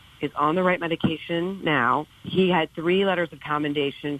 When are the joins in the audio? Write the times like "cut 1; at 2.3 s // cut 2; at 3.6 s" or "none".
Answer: cut 1; at 2.1 s